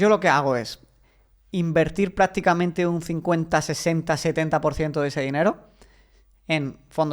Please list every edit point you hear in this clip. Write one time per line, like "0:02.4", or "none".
none